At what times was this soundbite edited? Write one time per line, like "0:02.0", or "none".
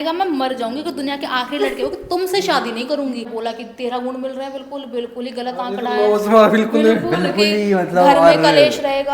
0:03.3

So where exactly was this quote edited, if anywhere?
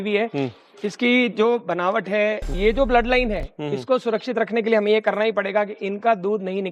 0:02.5

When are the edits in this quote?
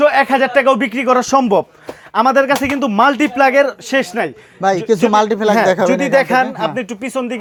none

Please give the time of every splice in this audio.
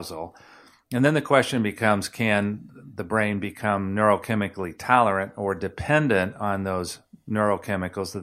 none

